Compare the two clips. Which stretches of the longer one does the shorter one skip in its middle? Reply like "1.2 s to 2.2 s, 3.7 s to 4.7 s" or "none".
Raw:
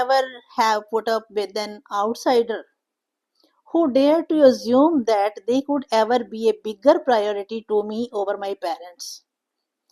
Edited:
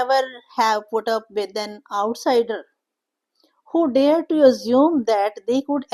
none